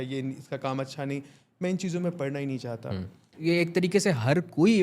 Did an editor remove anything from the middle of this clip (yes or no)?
yes